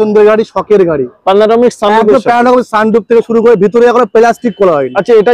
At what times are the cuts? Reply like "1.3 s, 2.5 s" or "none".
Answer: none